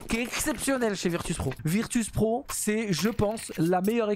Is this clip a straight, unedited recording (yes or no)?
no